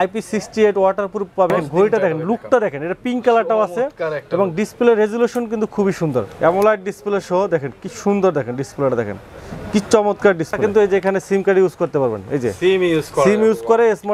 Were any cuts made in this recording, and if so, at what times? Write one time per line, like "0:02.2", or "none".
0:01.6
0:06.3
0:10.6